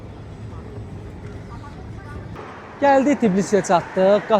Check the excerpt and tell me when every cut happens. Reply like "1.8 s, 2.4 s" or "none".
2.4 s